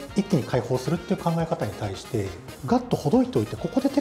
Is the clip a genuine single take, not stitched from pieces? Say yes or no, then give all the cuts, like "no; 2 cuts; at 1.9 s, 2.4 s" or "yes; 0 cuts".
no; 1 cut; at 2.5 s